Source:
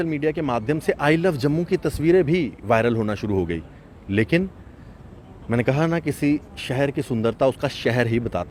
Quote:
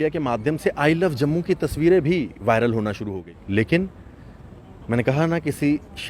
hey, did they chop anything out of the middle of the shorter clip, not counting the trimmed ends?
yes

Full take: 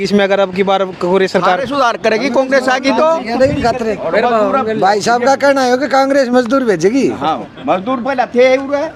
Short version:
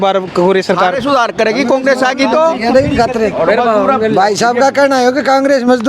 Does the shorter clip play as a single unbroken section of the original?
yes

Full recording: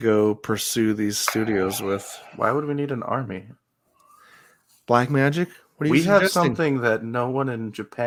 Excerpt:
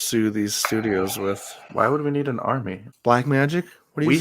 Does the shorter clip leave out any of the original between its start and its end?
yes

